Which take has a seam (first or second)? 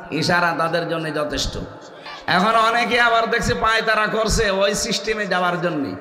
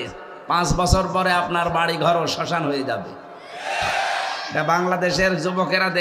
first